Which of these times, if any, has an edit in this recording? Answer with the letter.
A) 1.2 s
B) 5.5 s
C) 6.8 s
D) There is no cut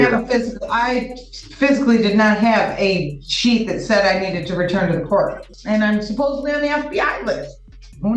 B